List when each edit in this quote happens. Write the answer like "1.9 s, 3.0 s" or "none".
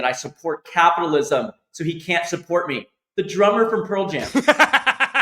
4.3 s